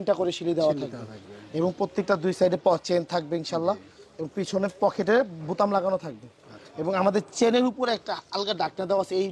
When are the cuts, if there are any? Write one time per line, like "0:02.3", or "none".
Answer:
none